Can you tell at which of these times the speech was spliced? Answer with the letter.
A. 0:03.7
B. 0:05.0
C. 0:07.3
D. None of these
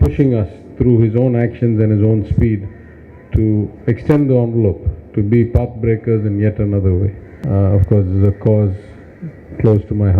C